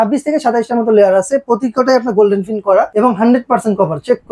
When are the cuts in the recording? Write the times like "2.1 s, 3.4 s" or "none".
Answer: 2.9 s